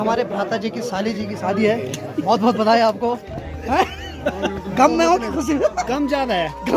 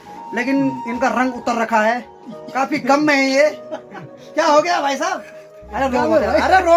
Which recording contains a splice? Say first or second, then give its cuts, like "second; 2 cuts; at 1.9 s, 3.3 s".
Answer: first; 1 cut; at 5.8 s